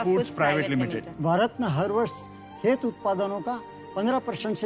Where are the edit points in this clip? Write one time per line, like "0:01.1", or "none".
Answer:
0:01.1